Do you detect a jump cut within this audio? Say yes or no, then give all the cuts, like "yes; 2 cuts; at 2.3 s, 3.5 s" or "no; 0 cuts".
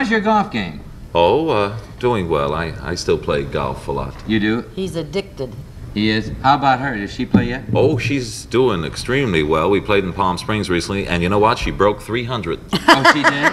no; 0 cuts